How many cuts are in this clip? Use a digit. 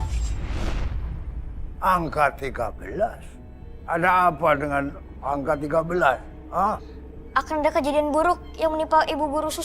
0